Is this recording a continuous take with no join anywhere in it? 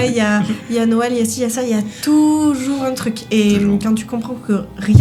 yes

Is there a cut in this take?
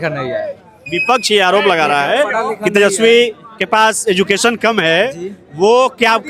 no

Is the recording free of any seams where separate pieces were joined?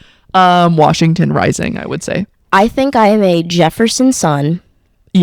yes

